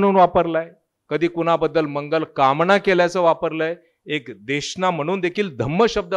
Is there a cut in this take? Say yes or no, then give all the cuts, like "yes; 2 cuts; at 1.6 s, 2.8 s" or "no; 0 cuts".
no; 0 cuts